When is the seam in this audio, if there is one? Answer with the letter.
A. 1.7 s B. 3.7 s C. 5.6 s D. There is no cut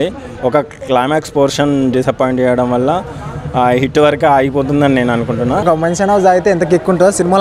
C